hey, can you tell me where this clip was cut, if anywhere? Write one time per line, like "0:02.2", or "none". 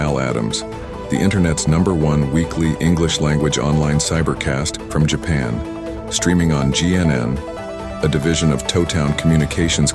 0:07.6